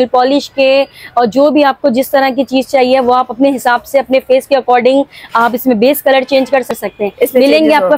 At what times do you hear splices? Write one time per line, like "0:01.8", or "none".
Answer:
0:06.8

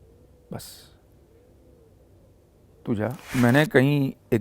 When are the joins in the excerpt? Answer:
0:03.2

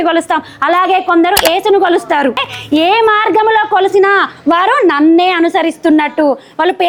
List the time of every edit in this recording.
none

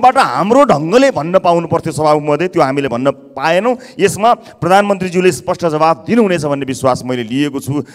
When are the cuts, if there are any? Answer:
none

